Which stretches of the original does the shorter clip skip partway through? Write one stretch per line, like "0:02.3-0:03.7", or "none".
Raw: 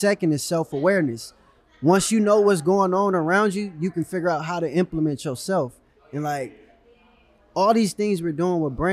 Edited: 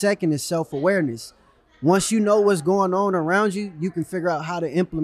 none